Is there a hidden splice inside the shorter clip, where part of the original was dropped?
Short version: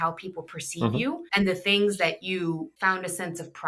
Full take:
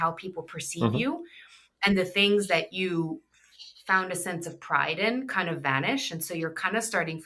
yes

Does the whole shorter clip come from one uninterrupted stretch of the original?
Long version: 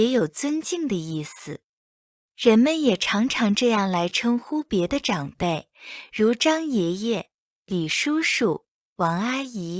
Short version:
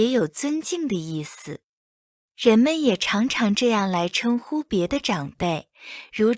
yes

